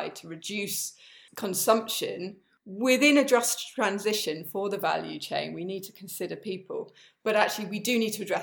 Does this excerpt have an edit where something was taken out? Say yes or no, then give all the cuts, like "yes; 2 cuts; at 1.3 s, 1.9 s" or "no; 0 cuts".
no; 0 cuts